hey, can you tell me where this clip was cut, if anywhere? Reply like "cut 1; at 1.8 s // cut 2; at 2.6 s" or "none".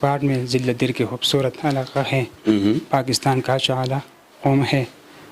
none